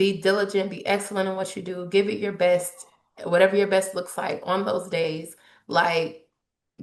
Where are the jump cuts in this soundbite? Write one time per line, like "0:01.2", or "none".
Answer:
none